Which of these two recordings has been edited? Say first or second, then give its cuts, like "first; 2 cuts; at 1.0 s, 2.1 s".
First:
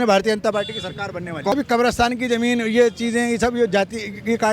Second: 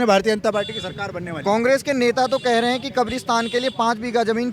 first; 1 cut; at 1.5 s